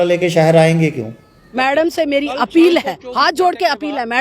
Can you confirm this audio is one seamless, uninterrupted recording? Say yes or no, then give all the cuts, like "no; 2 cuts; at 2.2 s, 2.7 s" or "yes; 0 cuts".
no; 1 cut; at 1.4 s